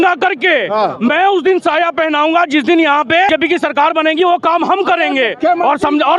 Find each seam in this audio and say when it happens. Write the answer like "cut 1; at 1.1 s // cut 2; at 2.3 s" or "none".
cut 1; at 3.3 s

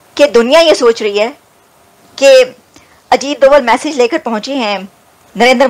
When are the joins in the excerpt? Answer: none

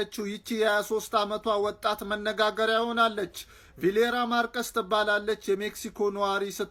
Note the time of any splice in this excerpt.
none

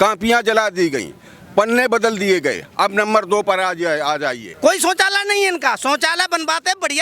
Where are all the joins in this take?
cut 1; at 4.5 s

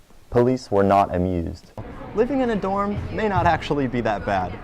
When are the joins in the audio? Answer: cut 1; at 1.9 s

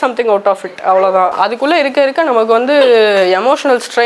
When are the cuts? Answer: cut 1; at 1.3 s

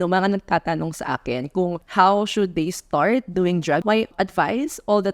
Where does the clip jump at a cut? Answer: cut 1; at 1.8 s // cut 2; at 4.0 s

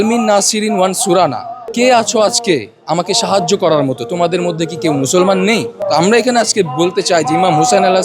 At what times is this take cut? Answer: cut 1; at 1.6 s // cut 2; at 5.8 s

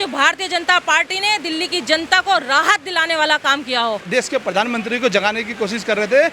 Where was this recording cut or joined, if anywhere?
cut 1; at 4.0 s

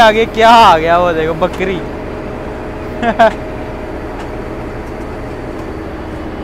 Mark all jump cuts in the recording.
none

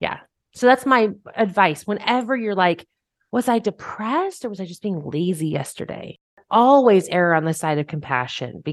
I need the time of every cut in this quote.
cut 1; at 6.4 s

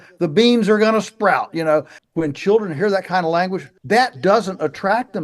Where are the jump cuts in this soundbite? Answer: cut 1; at 2.0 s // cut 2; at 3.7 s

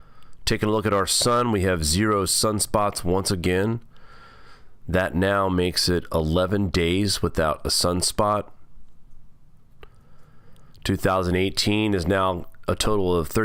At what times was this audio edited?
none

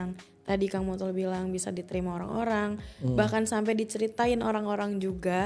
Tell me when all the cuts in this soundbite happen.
none

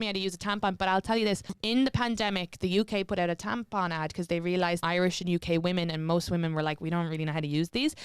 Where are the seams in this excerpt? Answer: cut 1; at 1.5 s // cut 2; at 4.8 s

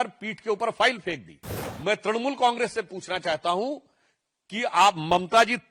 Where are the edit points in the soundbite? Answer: none

